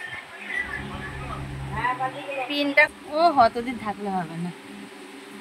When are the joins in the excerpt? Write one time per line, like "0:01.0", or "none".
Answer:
0:03.0